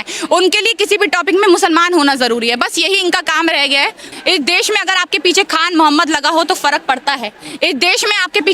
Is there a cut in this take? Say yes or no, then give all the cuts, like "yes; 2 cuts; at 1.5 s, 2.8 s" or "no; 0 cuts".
yes; 1 cut; at 4.0 s